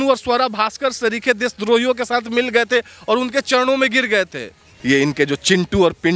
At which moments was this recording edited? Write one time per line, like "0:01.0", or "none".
0:04.5